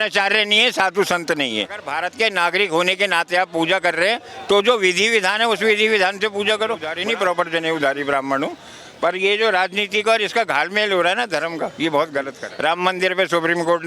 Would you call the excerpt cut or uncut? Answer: cut